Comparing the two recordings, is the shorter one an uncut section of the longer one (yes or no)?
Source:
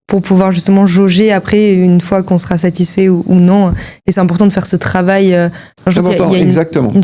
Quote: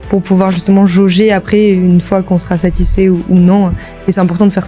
yes